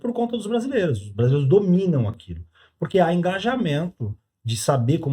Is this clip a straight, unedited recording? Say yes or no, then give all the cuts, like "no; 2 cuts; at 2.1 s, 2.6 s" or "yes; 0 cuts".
yes; 0 cuts